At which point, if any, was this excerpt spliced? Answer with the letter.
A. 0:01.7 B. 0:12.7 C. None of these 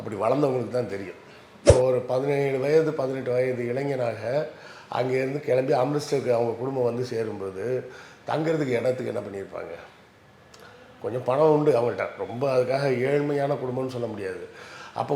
A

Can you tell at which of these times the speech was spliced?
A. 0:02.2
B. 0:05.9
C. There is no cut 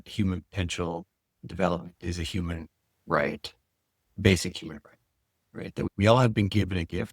B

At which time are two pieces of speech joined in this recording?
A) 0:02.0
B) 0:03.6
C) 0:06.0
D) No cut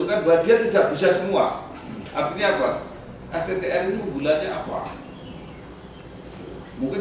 A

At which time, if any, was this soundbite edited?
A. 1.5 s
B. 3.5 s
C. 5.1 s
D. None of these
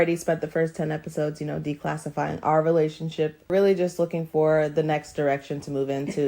B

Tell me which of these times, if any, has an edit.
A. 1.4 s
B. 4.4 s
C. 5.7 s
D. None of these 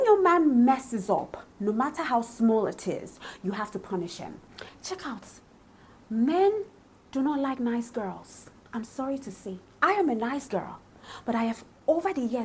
B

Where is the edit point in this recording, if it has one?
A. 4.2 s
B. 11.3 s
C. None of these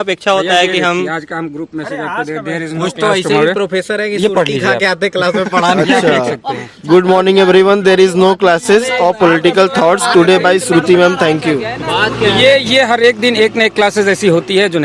C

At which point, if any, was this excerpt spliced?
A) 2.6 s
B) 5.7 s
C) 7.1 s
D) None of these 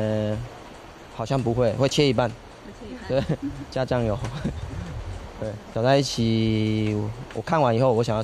B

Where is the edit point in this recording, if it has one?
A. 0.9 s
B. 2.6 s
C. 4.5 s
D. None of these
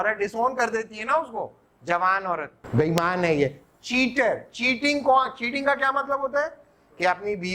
B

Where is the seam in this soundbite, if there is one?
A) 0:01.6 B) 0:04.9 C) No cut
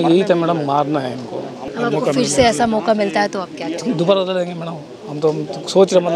A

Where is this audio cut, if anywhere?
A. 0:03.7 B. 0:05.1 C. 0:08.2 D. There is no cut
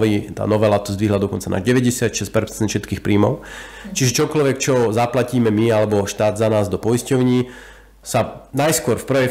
C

